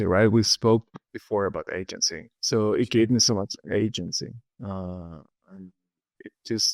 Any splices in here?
no; 0 cuts

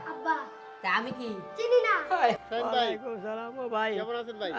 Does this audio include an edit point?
yes; 1 cut; at 2.4 s

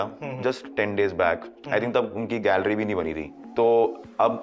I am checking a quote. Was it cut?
yes; 1 cut; at 3.4 s

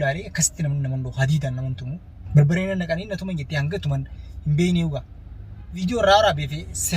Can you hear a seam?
yes; 1 cut; at 5.8 s

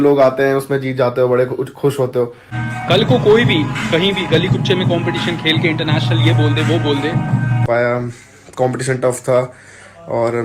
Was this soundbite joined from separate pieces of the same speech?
yes; 2 cuts; at 2.5 s, 7.6 s

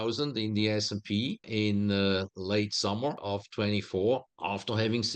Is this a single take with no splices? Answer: no; 3 cuts; at 1.5 s, 3.2 s, 4.3 s

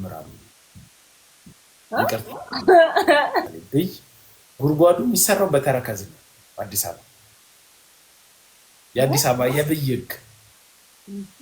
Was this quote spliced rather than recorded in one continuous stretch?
yes; 1 cut; at 3.6 s

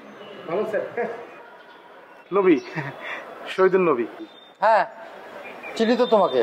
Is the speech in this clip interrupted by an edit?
no; 0 cuts

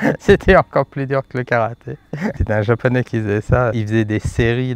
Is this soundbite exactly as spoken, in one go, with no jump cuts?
no; 2 cuts; at 2.4 s, 3.8 s

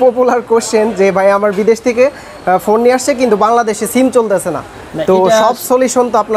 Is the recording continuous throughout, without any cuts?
yes; 0 cuts

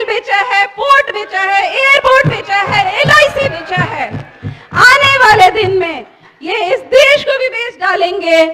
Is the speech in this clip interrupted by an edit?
no; 0 cuts

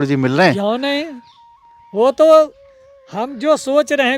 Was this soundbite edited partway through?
no; 0 cuts

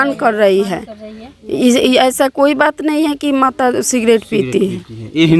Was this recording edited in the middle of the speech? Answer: no; 0 cuts

